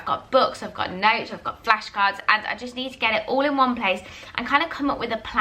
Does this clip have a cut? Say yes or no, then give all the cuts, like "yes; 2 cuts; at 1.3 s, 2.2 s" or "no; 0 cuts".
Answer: no; 0 cuts